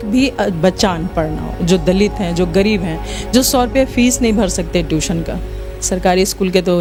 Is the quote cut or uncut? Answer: uncut